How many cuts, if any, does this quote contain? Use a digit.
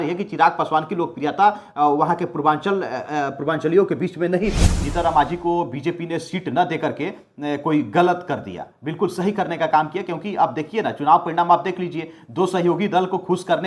1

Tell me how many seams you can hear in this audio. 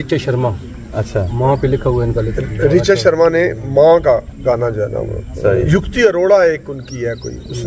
1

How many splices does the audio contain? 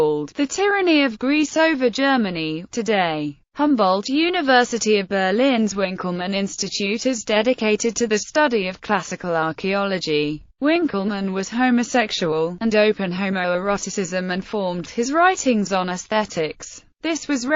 1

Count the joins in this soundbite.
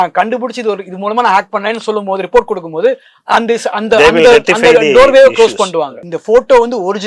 1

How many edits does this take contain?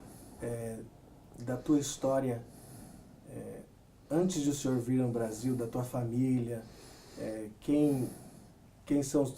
1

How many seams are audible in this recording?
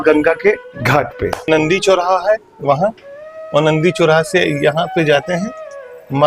1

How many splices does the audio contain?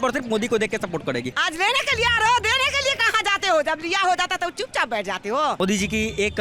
2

